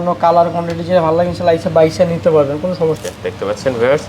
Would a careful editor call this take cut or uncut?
cut